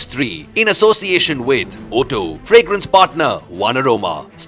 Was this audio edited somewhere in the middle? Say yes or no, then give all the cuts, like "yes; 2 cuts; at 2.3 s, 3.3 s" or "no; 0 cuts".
no; 0 cuts